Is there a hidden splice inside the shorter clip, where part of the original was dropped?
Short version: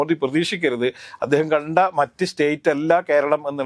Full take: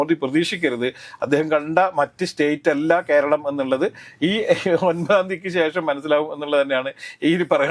no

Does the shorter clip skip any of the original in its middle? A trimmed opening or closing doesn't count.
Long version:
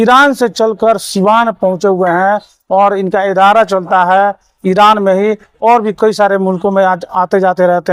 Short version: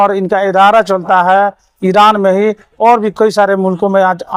no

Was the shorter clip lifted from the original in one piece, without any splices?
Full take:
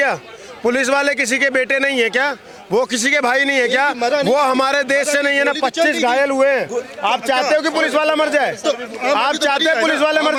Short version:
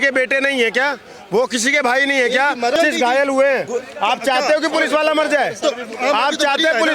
no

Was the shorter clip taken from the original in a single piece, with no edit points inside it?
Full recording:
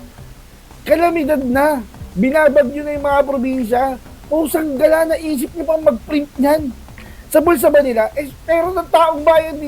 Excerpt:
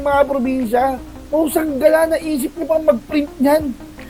yes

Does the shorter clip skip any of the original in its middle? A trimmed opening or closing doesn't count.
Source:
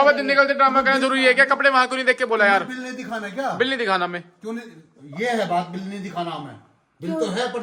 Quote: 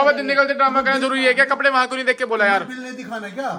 no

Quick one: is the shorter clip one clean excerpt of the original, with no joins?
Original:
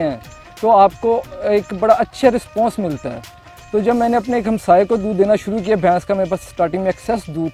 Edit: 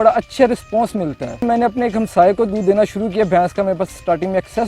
no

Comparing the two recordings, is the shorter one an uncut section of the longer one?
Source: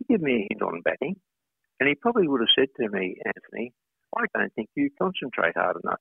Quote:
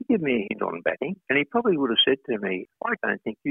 no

